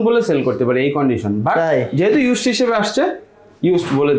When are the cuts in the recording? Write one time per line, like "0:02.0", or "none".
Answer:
none

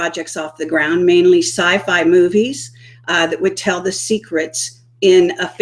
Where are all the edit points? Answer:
0:03.4

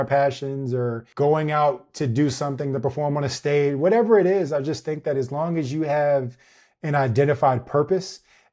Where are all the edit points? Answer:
0:01.0

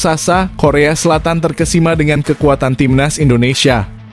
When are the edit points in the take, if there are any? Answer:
none

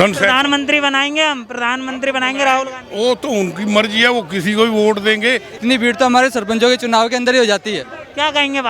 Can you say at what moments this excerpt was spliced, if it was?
0:05.5

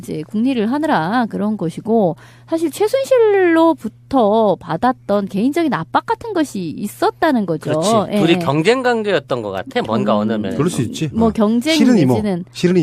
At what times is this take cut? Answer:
none

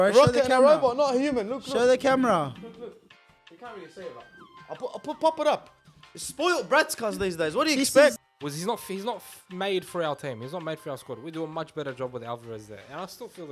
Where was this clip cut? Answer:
0:08.2

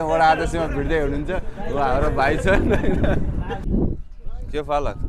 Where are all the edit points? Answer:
0:03.6

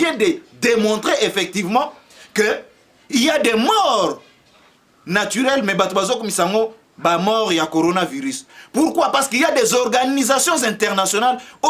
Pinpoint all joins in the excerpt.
none

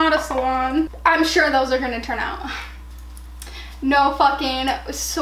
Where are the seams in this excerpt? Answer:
0:00.9

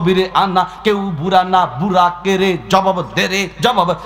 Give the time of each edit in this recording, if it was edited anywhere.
none

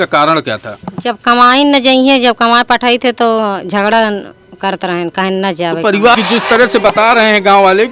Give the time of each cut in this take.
0:06.1

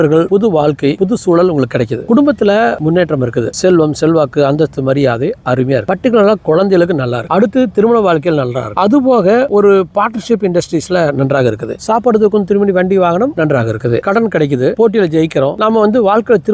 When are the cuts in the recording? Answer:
none

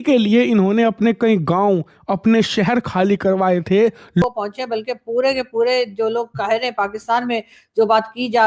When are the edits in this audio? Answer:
0:04.2

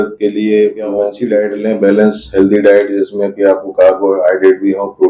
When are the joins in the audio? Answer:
0:01.1

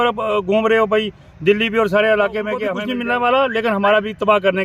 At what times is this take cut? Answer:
0:02.7

